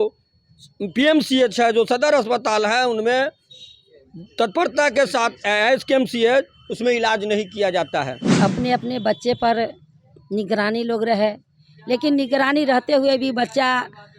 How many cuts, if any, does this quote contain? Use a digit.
1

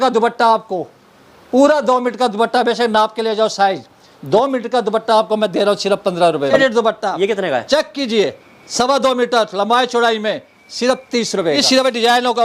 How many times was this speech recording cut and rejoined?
2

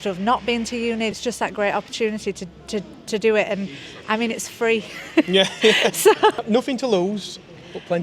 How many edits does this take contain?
2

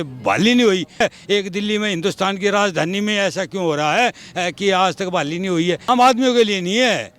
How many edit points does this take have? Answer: 2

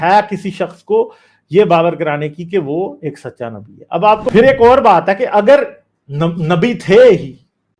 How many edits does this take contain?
1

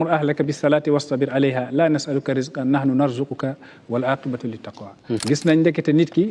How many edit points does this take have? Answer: 1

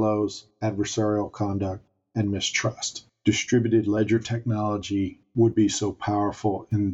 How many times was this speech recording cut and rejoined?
1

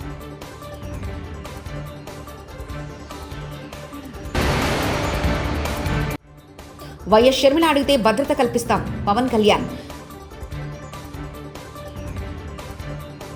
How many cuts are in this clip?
0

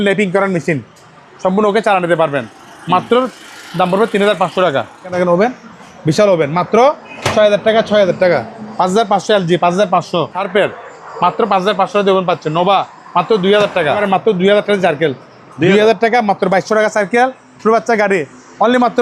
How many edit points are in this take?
3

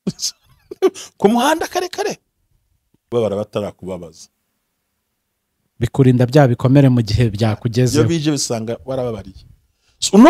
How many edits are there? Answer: 1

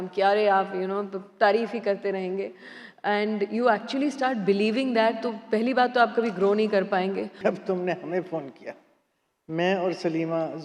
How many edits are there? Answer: 1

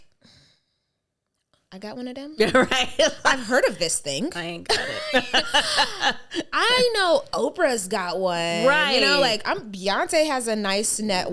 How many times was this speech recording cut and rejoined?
0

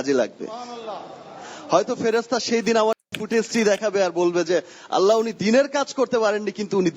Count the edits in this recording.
1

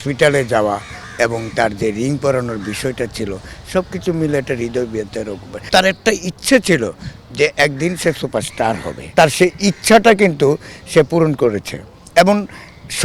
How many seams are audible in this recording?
2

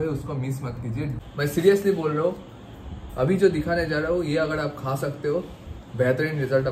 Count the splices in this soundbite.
1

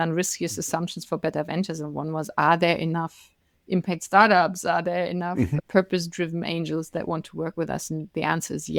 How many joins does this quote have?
0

